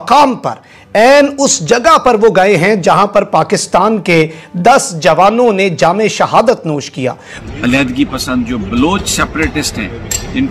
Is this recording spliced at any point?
yes; 1 cut; at 7.3 s

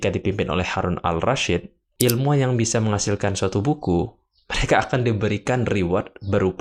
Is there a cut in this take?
yes; 1 cut; at 1.9 s

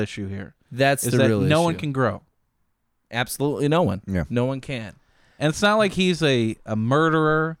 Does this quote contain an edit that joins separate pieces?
no; 0 cuts

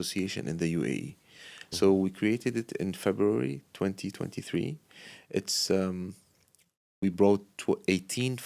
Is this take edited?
no; 0 cuts

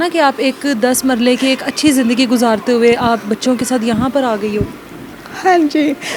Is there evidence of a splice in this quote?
no; 0 cuts

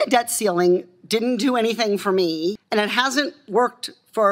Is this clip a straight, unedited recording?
no; 1 cut; at 2.6 s

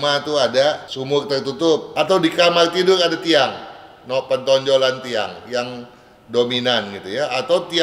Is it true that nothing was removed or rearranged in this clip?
no; 2 cuts; at 0.9 s, 1.9 s

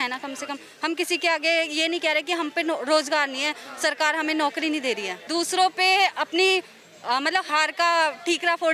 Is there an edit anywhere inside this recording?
yes; 1 cut; at 5.2 s

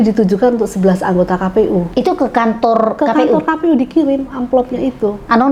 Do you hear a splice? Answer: no; 0 cuts

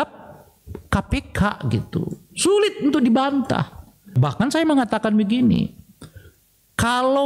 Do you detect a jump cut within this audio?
yes; 1 cut; at 4.2 s

